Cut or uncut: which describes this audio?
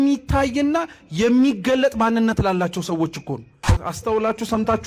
cut